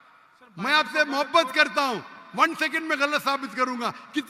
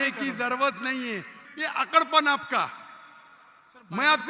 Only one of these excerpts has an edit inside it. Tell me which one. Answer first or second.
second